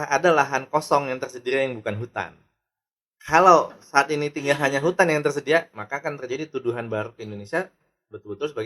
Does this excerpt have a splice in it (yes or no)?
no